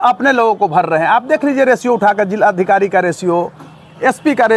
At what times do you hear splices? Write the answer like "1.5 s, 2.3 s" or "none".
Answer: none